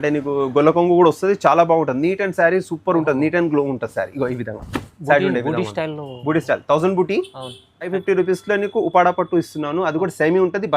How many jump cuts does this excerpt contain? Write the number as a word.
one